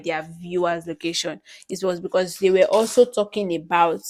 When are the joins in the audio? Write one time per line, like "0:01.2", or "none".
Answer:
none